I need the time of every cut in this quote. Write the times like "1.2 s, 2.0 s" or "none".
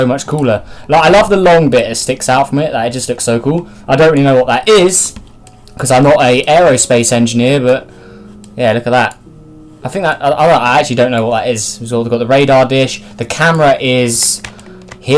6.5 s